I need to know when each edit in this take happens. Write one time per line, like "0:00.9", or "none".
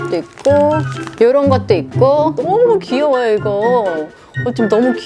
0:02.4